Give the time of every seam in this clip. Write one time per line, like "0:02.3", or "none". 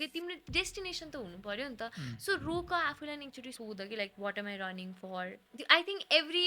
0:03.5
0:05.5